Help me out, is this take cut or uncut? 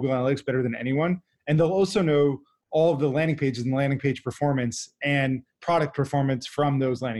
uncut